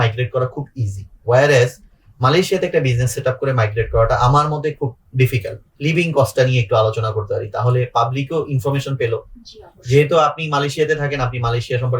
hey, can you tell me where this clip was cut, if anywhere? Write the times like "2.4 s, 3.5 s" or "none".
5.7 s